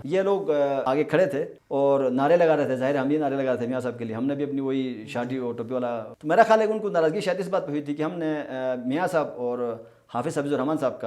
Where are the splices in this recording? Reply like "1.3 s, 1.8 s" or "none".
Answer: 1.1 s, 6.1 s